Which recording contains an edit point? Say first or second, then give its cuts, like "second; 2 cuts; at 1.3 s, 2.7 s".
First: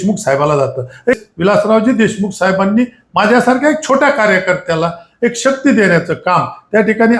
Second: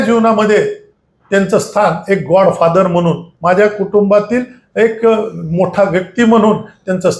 first; 1 cut; at 1.2 s